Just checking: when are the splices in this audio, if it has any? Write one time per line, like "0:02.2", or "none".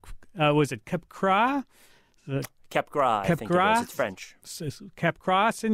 0:03.7